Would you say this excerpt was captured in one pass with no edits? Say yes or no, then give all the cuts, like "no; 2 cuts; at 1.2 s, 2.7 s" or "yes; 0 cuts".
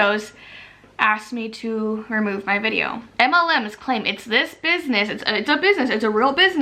no; 1 cut; at 3.0 s